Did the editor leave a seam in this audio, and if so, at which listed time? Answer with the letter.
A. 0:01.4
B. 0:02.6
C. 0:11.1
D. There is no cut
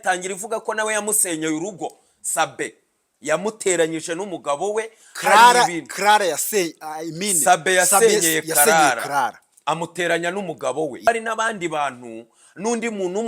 C